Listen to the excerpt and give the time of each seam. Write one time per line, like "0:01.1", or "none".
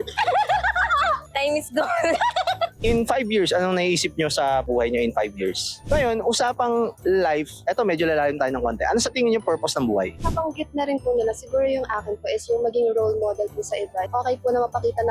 0:05.8
0:10.1
0:14.1